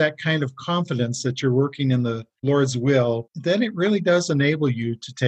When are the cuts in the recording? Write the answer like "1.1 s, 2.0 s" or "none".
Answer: 2.3 s